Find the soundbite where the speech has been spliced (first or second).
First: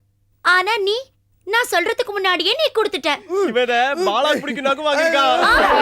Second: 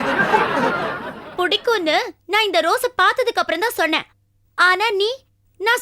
first